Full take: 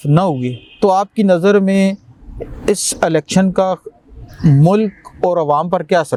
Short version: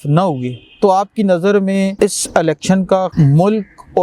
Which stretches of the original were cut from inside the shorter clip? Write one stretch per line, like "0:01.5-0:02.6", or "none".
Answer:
0:01.9-0:02.6
0:03.8-0:04.4